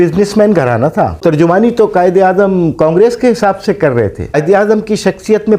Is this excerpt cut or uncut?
cut